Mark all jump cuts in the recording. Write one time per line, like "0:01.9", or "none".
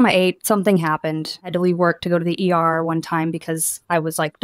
0:01.4